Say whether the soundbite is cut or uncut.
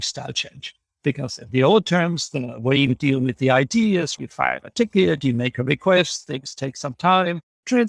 uncut